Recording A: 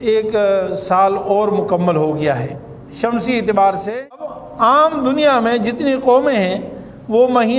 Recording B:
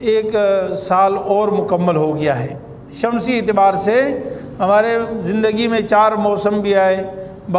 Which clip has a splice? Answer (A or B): A